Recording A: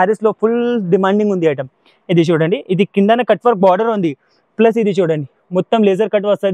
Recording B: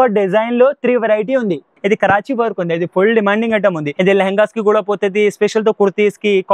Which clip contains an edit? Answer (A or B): B